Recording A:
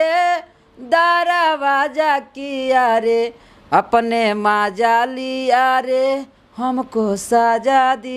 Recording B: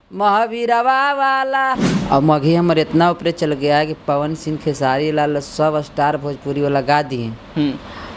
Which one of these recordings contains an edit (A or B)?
B